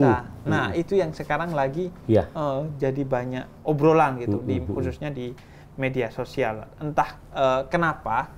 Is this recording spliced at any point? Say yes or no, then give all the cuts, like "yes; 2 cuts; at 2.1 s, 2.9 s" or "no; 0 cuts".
no; 0 cuts